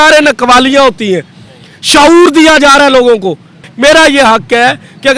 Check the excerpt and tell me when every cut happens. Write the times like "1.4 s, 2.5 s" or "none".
3.7 s

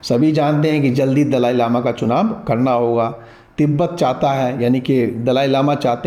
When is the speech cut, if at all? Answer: none

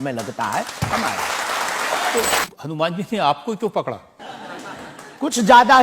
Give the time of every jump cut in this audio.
2.5 s

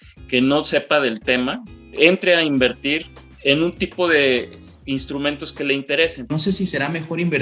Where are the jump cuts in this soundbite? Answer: 1.9 s, 6.3 s

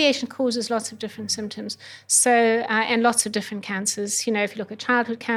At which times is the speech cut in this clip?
none

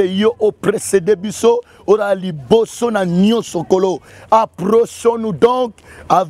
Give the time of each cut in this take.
4.1 s

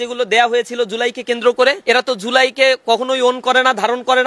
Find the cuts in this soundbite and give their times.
1.8 s

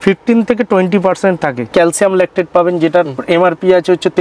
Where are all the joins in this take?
1.7 s

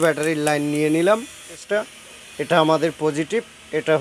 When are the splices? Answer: 1.6 s

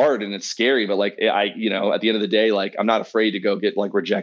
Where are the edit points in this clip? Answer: none

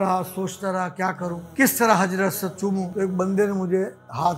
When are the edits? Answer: 1.4 s, 2.9 s

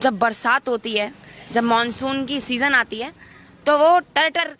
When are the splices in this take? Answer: none

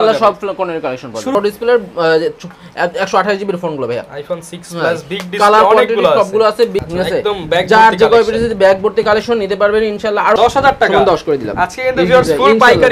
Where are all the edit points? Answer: 1.4 s, 6.8 s, 10.4 s

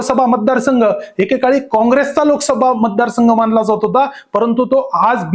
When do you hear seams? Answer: none

